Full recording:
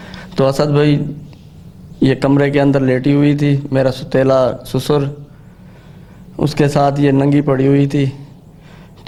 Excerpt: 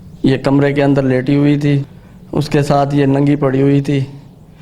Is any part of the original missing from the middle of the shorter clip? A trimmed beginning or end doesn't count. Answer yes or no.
yes